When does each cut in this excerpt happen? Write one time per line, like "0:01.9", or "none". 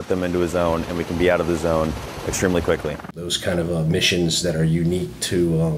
0:03.3